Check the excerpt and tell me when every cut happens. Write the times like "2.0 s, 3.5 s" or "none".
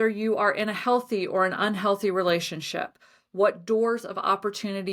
none